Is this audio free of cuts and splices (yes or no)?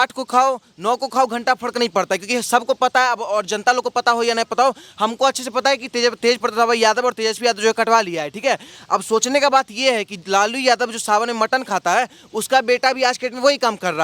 yes